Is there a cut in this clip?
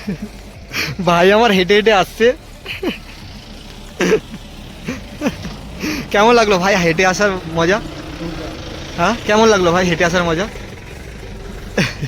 no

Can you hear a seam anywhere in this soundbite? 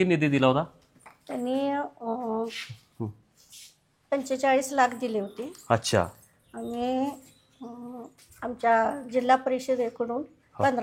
no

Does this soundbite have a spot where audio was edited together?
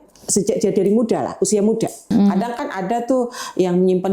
yes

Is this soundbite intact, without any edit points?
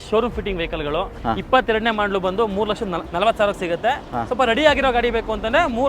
no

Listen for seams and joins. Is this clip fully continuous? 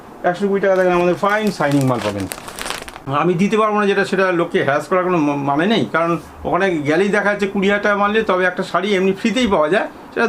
no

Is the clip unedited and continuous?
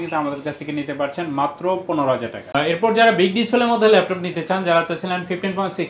yes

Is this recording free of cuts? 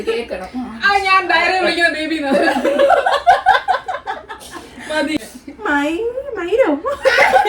no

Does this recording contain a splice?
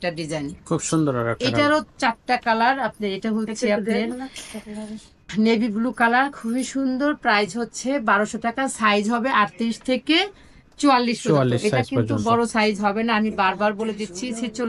no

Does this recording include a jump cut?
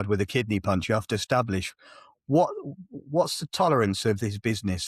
no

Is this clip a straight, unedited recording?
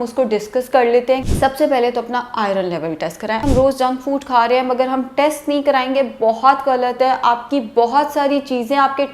no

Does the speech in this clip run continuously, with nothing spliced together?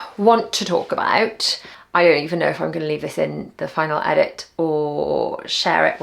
yes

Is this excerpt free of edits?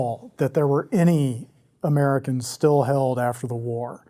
yes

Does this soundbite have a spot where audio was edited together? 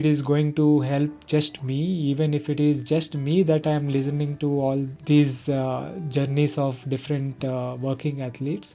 no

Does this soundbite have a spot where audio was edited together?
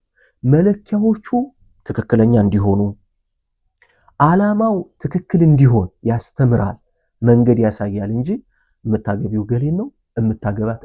no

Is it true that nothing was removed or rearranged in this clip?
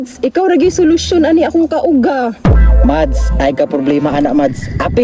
yes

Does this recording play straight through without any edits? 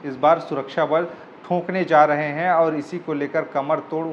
yes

